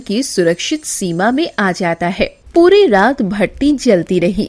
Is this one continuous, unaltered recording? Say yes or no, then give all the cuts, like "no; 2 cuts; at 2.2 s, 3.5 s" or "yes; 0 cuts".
no; 1 cut; at 2.4 s